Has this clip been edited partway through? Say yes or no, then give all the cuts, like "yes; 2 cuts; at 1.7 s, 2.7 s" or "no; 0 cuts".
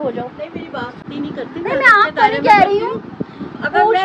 yes; 1 cut; at 1.0 s